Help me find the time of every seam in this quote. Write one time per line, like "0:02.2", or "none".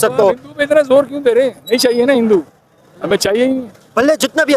none